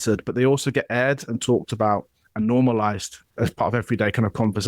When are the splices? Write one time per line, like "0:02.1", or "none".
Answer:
0:03.2